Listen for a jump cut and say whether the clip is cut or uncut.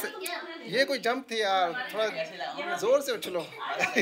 uncut